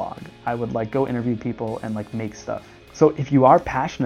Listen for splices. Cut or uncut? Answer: cut